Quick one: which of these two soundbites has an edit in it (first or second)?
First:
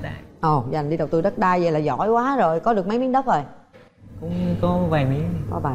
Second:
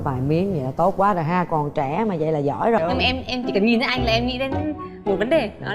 second